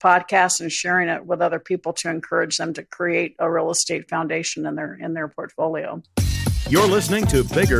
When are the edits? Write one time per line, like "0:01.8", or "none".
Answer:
0:06.0

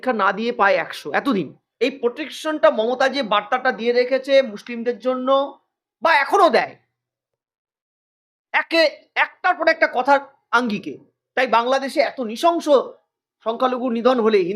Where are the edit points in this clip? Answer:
0:01.6

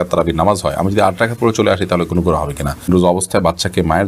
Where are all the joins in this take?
0:02.9

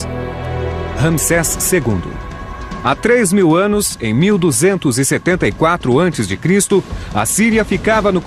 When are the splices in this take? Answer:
0:05.4

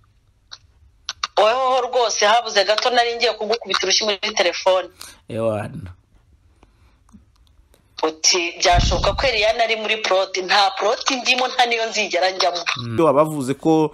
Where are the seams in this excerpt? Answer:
0:12.9

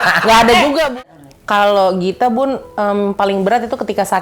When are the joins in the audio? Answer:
0:01.1

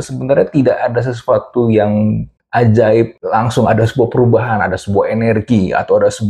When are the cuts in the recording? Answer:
0:02.3
0:03.2

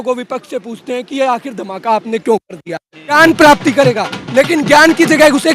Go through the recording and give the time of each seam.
0:03.1

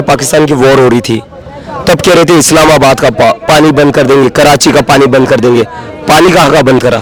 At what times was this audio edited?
none

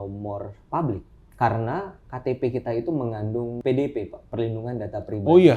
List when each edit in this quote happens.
0:01.2
0:03.6

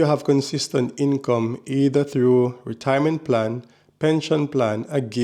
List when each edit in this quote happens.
none

